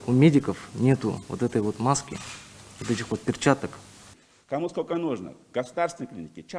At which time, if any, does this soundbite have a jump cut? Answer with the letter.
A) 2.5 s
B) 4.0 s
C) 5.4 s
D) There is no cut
B